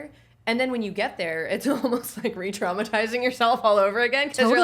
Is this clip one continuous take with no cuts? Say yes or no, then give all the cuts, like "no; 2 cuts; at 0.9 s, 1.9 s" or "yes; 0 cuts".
yes; 0 cuts